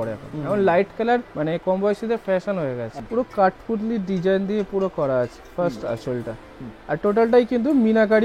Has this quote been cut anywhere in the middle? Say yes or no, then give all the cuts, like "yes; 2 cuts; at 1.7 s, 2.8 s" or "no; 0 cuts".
yes; 2 cuts; at 1.3 s, 2.9 s